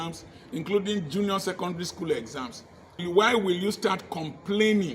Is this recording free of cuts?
no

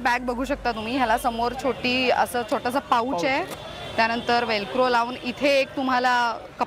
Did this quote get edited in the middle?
no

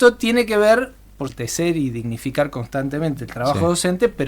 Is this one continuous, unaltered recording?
no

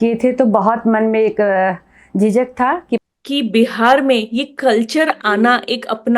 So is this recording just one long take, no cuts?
no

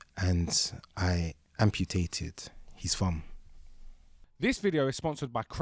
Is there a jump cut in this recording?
no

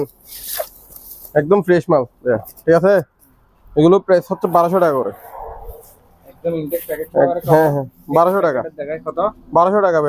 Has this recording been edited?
no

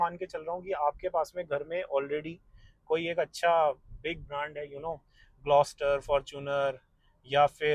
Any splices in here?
no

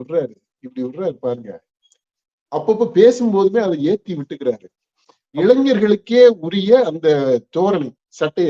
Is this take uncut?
no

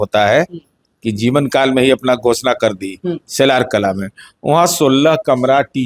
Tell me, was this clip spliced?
no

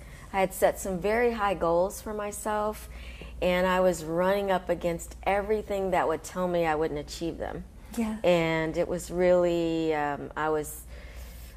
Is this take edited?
no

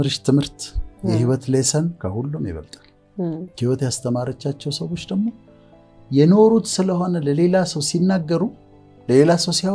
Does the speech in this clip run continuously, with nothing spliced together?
yes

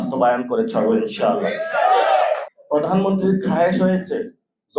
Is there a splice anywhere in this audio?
yes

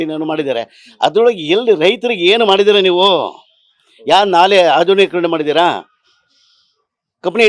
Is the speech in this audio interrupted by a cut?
no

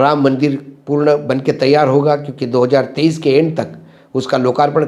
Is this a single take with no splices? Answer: yes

